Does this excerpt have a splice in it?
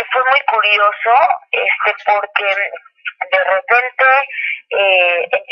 no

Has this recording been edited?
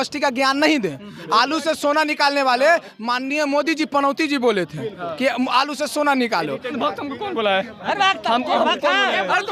yes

